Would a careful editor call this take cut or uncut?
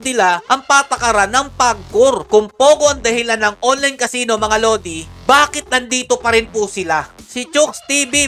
cut